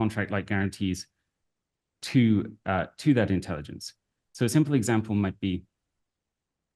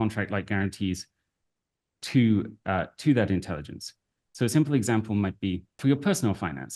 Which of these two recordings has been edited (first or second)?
second